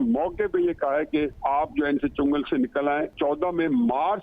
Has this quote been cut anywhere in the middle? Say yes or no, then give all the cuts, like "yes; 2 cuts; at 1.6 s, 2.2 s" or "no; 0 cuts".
yes; 2 cuts; at 1.4 s, 3.1 s